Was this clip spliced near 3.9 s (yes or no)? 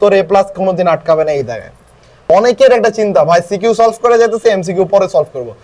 no